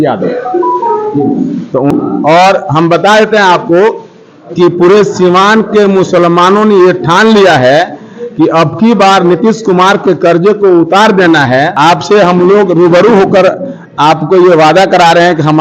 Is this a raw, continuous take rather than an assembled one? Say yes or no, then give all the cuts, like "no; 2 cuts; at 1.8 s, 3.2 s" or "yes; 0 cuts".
no; 2 cuts; at 1.9 s, 11.7 s